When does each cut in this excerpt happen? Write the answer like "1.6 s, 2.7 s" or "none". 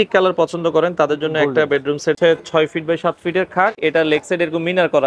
2.2 s, 3.8 s